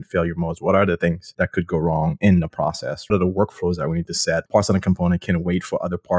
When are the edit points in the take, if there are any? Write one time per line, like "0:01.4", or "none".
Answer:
0:01.2
0:03.1
0:04.5